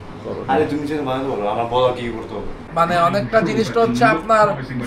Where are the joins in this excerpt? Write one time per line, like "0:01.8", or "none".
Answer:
0:02.7